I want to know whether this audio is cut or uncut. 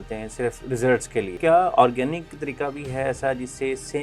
cut